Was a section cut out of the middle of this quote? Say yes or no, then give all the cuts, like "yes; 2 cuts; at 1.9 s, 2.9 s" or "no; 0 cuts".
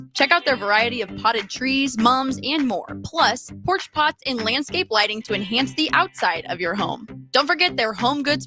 no; 0 cuts